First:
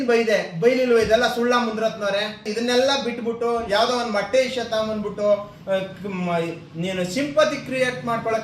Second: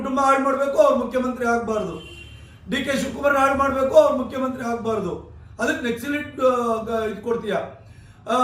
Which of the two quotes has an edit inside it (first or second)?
first